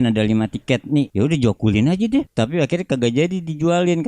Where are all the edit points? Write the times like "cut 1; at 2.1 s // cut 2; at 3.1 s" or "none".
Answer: cut 1; at 1.1 s // cut 2; at 2.3 s